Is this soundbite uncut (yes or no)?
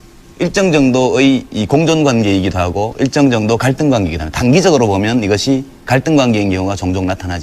yes